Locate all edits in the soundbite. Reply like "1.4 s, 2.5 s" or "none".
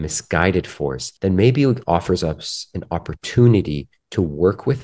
1.1 s